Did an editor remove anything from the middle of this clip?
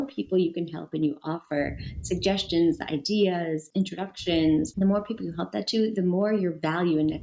yes; 2 cuts; at 3.7 s, 4.7 s

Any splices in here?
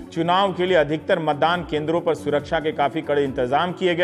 yes; 1 cut; at 2.4 s

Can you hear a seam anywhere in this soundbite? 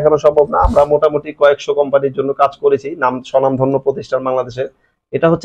no; 0 cuts

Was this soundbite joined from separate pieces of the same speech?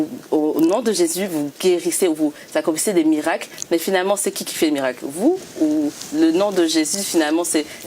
no; 0 cuts

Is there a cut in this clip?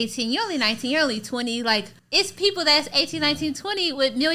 yes; 1 cut; at 2.0 s

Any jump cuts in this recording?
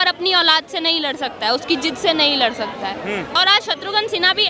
yes; 1 cut; at 3.4 s

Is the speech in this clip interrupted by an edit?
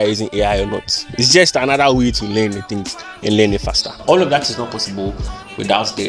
yes; 1 cut; at 4.0 s

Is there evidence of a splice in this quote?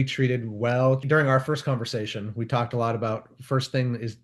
yes; 1 cut; at 1.0 s

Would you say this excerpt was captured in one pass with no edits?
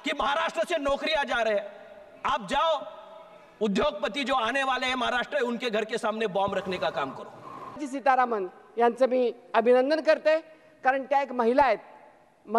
yes; 0 cuts

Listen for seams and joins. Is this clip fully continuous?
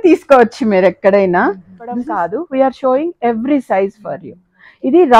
no; 1 cut; at 2.1 s

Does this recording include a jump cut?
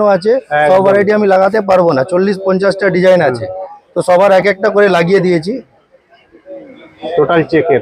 no; 0 cuts

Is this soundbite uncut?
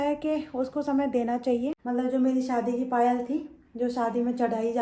no; 1 cut; at 1.8 s

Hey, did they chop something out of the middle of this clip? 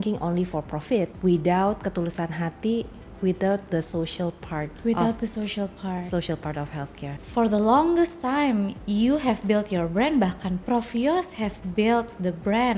yes; 4 cuts; at 1.1 s, 4.7 s, 7.2 s, 8.8 s

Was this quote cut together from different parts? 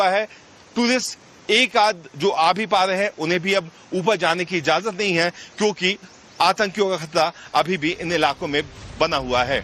no; 0 cuts

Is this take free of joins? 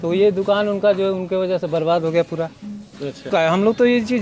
no; 1 cut; at 3.3 s

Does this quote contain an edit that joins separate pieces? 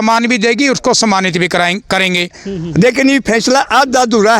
yes; 1 cut; at 2.4 s

